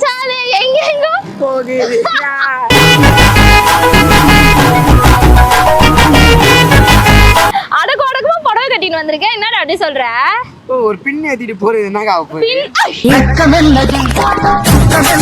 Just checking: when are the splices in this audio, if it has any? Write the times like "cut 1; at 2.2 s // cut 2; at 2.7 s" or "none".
cut 1; at 7.5 s